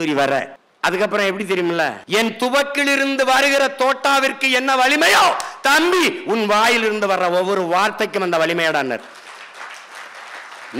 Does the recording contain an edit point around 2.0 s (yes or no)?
yes